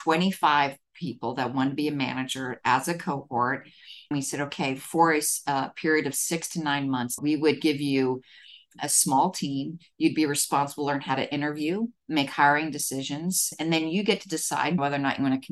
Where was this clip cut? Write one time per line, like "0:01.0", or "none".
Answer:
0:04.1
0:07.2
0:08.8
0:13.4
0:14.8